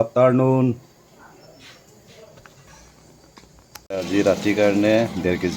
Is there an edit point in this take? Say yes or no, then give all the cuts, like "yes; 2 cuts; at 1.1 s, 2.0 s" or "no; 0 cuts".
yes; 1 cut; at 3.9 s